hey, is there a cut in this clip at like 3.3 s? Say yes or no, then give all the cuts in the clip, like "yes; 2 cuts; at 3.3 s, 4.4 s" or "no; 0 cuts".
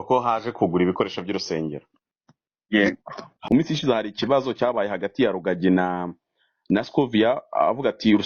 yes; 1 cut; at 3.3 s